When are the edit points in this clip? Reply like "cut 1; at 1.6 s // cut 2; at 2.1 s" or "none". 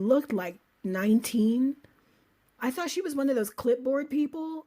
cut 1; at 2.6 s